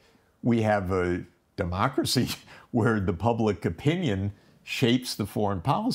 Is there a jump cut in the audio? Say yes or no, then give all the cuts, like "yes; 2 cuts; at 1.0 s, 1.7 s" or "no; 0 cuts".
no; 0 cuts